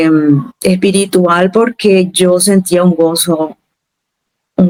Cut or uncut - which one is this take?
uncut